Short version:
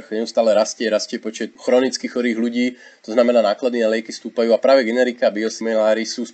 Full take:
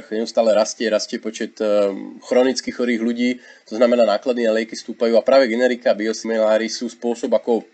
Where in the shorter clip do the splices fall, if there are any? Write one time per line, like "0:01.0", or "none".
0:01.5